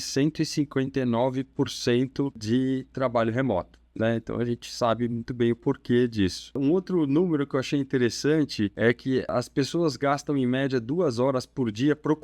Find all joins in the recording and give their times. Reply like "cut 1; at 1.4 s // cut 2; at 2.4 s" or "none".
cut 1; at 2.4 s // cut 2; at 6.6 s // cut 3; at 9.1 s